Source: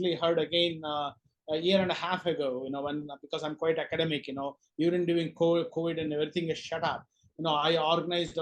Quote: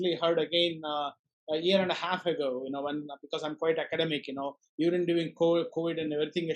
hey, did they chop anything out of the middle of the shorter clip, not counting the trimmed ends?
no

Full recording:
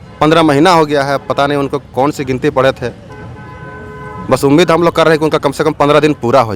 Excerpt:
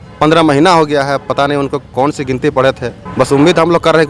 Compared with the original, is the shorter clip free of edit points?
no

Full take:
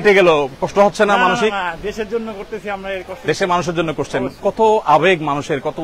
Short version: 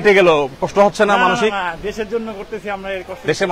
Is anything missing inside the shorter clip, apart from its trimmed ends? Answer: no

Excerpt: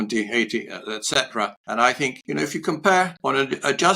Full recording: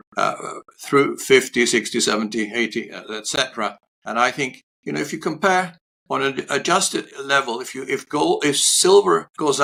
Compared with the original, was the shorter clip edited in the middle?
yes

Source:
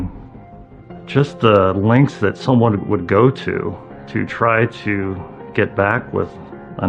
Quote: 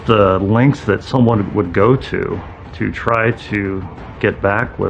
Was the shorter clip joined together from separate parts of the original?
no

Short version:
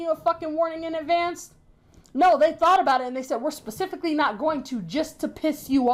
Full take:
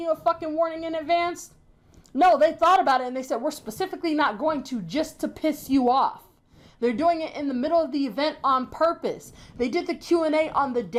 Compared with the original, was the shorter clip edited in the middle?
no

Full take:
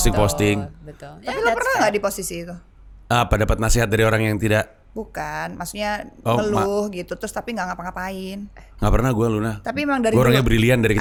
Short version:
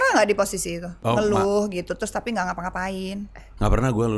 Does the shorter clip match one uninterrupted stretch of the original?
no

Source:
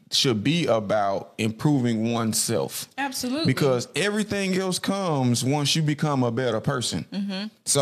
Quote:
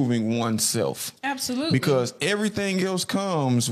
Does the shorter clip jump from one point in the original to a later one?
no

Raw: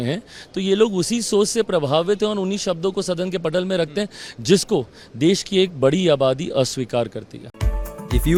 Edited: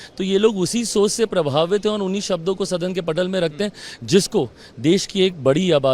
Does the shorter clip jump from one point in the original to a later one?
no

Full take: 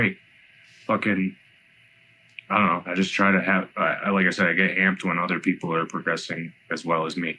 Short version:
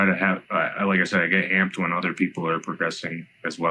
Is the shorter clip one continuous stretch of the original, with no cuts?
yes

